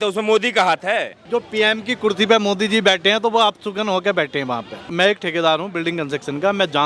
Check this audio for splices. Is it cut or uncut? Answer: cut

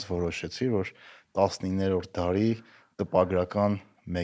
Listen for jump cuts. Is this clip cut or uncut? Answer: uncut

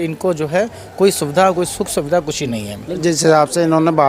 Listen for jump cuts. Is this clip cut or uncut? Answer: cut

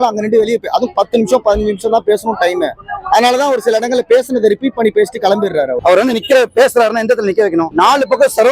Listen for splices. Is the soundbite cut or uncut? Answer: cut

